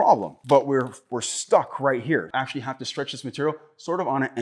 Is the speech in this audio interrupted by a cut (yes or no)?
no